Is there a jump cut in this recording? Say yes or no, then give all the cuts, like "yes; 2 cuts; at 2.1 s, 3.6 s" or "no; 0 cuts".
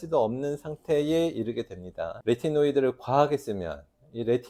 no; 0 cuts